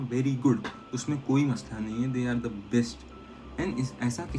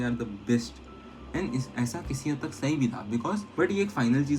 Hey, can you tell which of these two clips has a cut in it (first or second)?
second